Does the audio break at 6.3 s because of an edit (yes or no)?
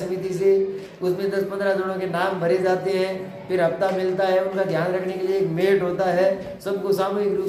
no